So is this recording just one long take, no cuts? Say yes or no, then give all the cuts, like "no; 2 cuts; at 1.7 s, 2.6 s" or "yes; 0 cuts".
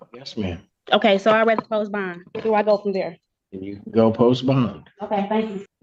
yes; 0 cuts